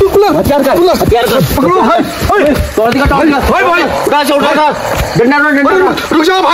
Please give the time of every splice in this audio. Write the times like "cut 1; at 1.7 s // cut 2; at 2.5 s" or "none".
none